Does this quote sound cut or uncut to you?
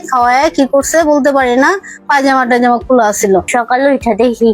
cut